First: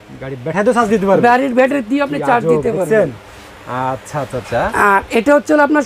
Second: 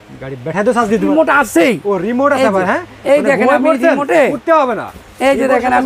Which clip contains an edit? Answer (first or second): second